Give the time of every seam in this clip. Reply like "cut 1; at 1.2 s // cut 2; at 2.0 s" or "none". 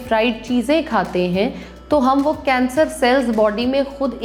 none

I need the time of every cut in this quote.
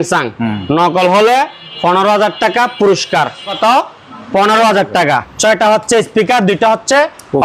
cut 1; at 3.6 s // cut 2; at 5.3 s

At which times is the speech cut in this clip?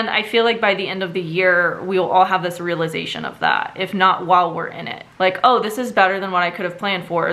none

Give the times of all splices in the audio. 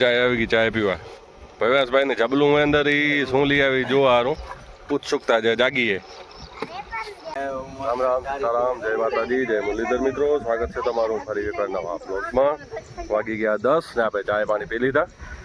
none

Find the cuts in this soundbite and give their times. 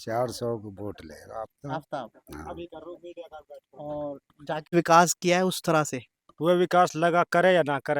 cut 1; at 4.7 s

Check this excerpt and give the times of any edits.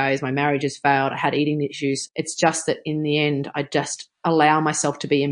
cut 1; at 2.0 s // cut 2; at 4.0 s

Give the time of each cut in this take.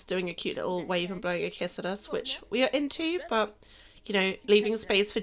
none

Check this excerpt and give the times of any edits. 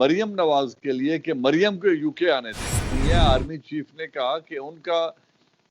cut 1; at 2.8 s

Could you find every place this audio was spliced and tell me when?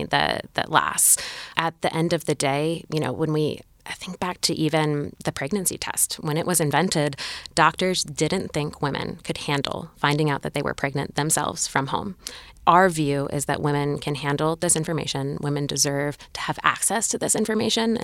cut 1; at 1.6 s

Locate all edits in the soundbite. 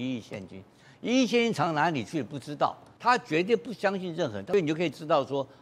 cut 1; at 2.9 s // cut 2; at 4.4 s

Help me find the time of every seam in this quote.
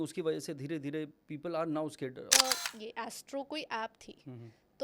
cut 1; at 2.3 s

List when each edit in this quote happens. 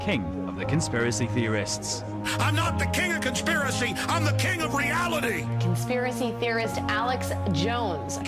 none

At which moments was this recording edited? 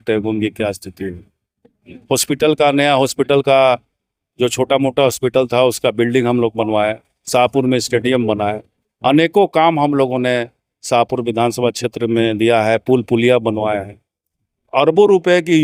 none

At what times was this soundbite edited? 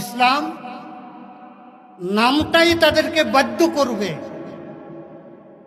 none

